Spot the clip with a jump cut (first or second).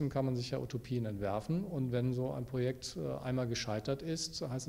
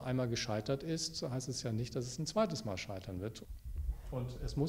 second